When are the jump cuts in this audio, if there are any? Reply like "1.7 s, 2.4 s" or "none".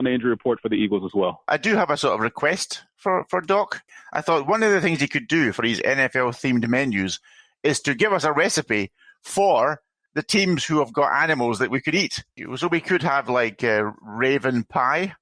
1.5 s, 3.8 s, 12.4 s